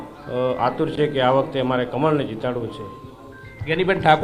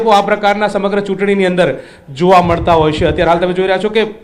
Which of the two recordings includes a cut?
second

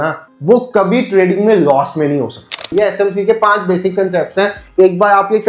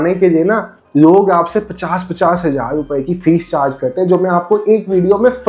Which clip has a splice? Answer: first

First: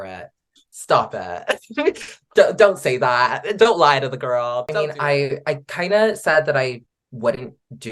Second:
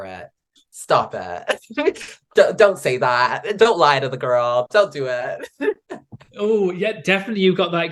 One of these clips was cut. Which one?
first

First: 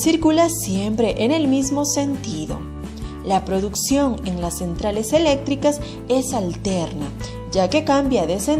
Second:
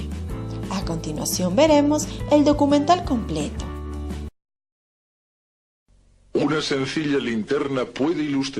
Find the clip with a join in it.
second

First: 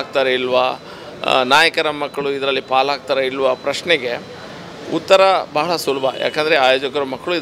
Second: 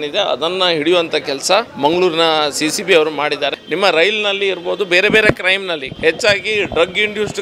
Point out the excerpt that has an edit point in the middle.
second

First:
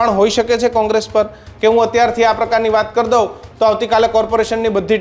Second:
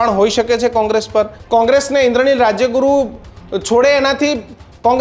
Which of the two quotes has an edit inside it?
second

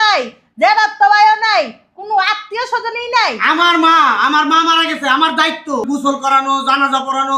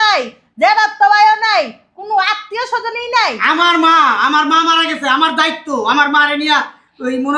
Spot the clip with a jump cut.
first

